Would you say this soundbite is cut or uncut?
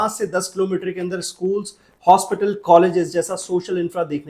uncut